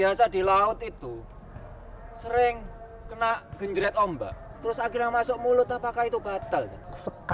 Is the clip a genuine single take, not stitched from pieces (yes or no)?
no